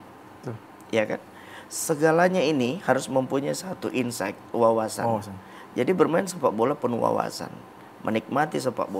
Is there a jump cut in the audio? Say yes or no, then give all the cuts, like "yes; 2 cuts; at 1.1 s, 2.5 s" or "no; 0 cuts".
no; 0 cuts